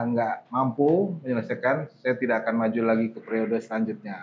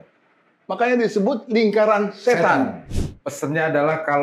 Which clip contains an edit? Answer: second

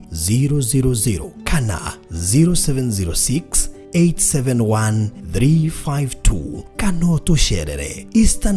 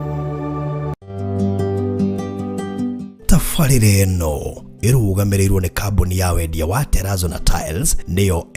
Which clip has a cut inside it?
second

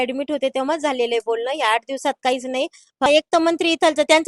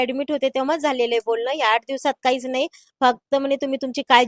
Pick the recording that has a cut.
first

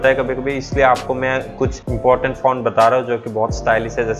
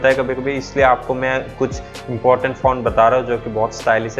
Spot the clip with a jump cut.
first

